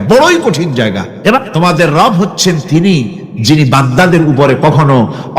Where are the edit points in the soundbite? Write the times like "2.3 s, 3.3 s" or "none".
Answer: 1.5 s

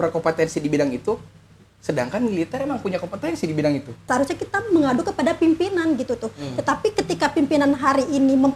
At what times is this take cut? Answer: 4.1 s

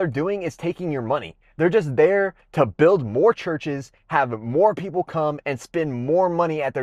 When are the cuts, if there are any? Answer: none

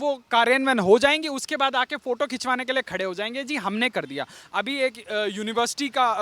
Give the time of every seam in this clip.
none

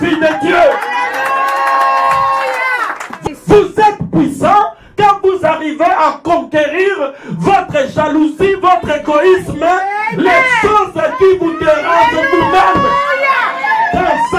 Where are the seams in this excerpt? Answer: 3.2 s

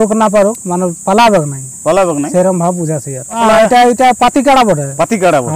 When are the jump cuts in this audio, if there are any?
3.4 s

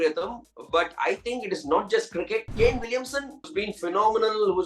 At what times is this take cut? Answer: 2.5 s, 3.5 s

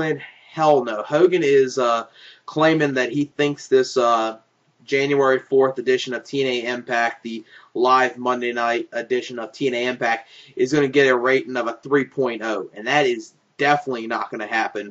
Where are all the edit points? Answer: none

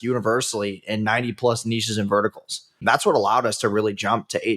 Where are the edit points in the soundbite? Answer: 2.8 s

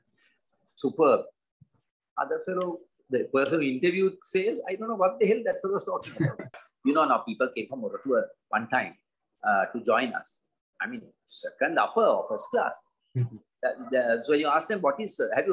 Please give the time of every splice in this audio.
6.7 s

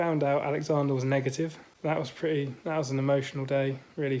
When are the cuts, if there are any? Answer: 1.7 s

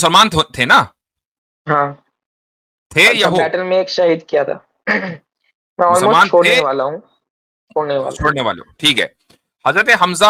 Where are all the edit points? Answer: none

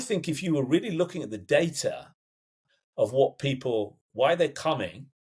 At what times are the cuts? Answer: none

